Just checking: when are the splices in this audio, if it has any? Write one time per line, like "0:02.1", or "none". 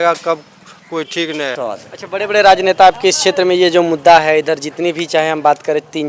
0:01.6